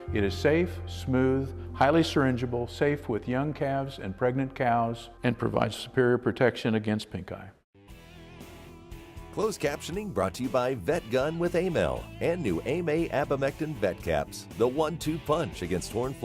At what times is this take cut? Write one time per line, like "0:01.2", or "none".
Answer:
0:07.8
0:09.3